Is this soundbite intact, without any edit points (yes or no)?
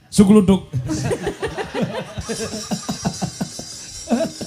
yes